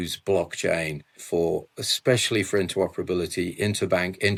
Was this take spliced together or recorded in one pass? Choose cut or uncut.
uncut